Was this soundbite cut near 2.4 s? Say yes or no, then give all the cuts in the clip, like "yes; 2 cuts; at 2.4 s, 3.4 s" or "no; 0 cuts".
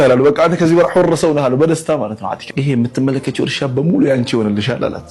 yes; 1 cut; at 2.4 s